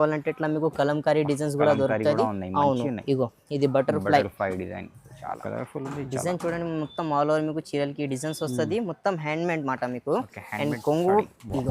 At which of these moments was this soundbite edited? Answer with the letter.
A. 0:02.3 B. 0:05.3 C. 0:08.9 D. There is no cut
B